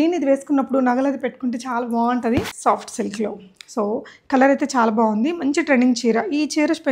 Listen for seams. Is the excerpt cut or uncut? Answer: cut